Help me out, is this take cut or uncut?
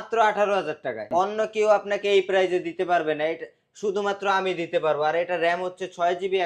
cut